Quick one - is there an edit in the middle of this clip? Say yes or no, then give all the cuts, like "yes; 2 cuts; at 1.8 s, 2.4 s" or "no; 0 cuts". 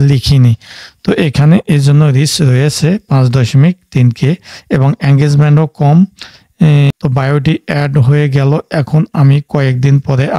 yes; 1 cut; at 6.9 s